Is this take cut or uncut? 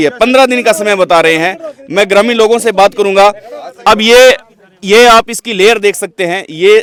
uncut